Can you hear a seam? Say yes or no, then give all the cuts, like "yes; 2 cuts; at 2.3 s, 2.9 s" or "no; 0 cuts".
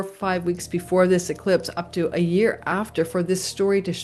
no; 0 cuts